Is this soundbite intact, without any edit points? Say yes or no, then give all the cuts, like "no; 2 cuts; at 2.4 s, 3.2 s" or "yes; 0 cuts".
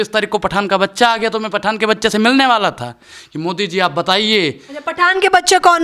yes; 0 cuts